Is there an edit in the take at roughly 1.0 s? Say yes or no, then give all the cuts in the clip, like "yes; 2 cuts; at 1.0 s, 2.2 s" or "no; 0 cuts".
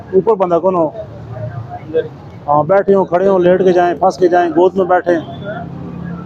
no; 0 cuts